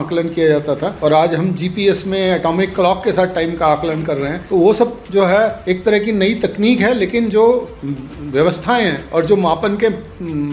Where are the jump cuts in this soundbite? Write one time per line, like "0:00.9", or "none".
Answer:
0:00.9
0:04.4
0:05.6
0:09.0